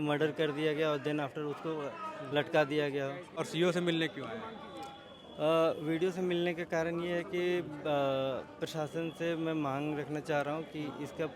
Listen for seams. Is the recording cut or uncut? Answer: uncut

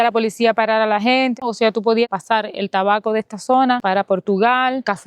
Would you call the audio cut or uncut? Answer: uncut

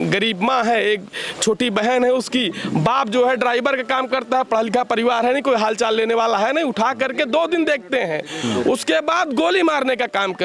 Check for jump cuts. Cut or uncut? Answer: uncut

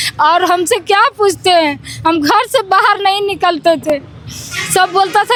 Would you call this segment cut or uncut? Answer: uncut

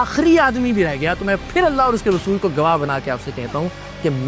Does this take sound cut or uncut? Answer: uncut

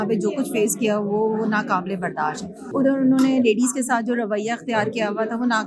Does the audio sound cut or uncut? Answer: cut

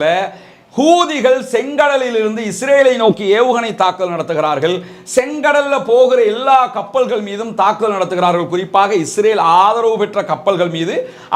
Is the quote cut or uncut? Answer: uncut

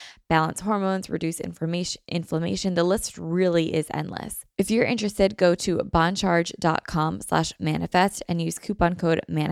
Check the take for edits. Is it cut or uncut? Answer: cut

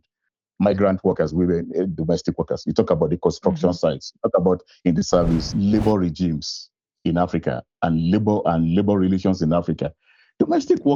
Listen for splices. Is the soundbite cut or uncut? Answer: cut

